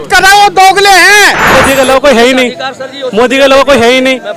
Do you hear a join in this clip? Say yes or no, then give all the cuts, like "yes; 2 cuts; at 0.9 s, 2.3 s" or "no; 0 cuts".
yes; 1 cut; at 1.6 s